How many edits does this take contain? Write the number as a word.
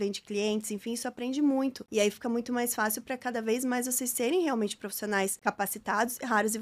two